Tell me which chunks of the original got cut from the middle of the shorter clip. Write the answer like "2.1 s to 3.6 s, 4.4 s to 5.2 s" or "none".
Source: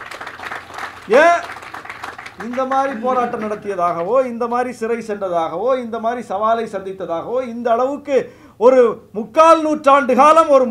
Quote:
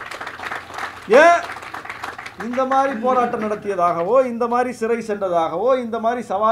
none